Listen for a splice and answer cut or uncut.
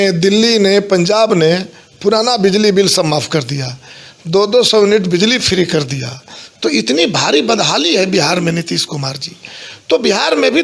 uncut